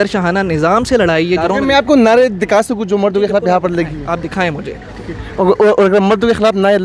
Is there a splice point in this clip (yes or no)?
yes